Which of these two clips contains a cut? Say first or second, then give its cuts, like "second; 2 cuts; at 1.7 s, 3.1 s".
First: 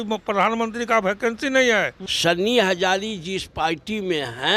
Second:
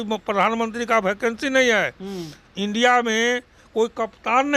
first; 1 cut; at 2.0 s